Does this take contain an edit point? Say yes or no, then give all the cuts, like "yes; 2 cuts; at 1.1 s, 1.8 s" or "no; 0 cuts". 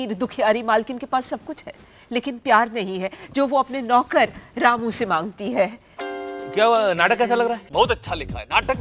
yes; 2 cuts; at 5.9 s, 7.6 s